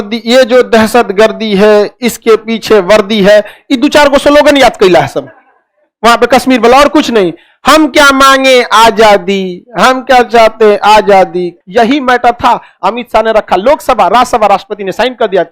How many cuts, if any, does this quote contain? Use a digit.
1